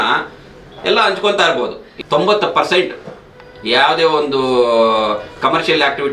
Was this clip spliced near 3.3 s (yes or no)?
no